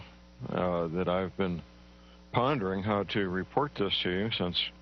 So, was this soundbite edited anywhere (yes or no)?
yes